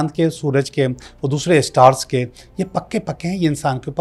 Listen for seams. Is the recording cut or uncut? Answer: uncut